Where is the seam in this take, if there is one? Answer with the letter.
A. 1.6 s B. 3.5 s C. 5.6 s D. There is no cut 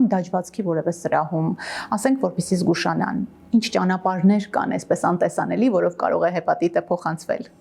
D